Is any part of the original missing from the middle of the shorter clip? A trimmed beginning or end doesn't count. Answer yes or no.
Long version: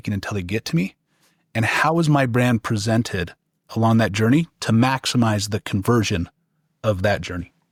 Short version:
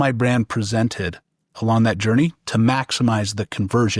no